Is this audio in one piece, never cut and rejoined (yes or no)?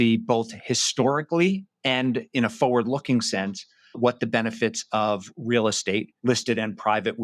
no